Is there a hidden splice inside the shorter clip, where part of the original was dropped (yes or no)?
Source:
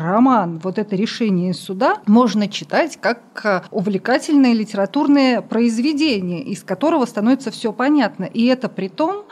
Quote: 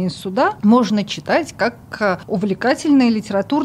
no